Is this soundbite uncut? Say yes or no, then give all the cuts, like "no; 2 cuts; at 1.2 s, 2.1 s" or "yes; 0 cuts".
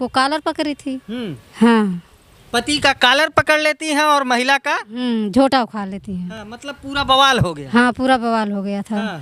yes; 0 cuts